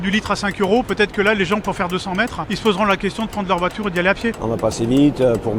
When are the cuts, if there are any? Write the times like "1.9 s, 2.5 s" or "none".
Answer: 2.4 s, 4.4 s